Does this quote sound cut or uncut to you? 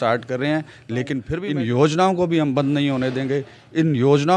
cut